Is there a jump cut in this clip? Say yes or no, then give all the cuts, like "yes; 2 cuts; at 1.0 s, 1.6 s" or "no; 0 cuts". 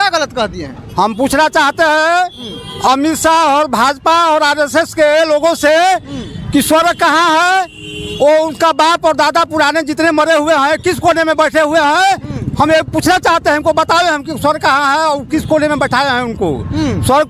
no; 0 cuts